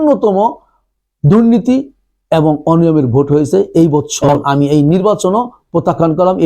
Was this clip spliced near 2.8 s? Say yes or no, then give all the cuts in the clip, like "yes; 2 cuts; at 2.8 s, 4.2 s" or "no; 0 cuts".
no; 1 cut; at 4.3 s